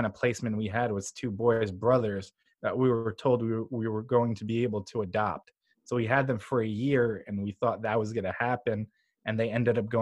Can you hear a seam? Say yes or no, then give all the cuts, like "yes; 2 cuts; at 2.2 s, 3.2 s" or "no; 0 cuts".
no; 0 cuts